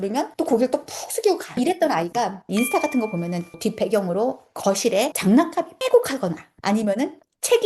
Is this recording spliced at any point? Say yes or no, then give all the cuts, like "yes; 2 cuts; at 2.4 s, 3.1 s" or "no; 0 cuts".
yes; 1 cut; at 2.4 s